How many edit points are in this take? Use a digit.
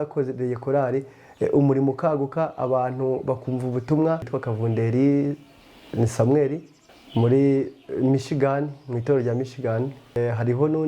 1